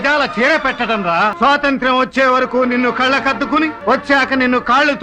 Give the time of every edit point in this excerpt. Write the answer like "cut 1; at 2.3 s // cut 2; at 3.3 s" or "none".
cut 1; at 1.3 s // cut 2; at 3.8 s